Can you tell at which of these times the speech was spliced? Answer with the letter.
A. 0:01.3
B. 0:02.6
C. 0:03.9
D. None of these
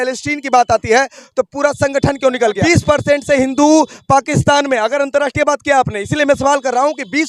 B